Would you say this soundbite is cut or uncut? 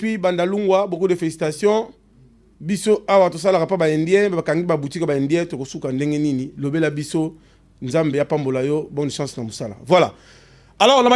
uncut